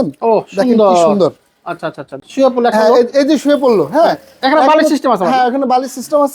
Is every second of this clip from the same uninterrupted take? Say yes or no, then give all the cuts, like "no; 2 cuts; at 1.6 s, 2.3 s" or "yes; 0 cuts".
no; 1 cut; at 2.2 s